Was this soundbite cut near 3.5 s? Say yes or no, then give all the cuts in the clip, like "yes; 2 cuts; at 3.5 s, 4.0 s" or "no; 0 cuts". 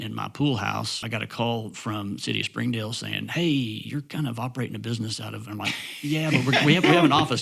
no; 1 cut; at 1.0 s